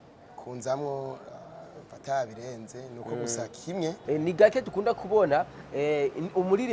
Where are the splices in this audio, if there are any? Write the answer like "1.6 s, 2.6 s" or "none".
4.0 s